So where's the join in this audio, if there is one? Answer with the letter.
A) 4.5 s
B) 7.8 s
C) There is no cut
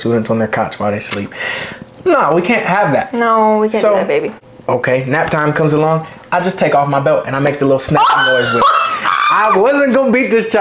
A